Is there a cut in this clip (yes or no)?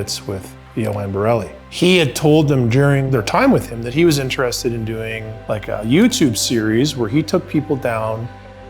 yes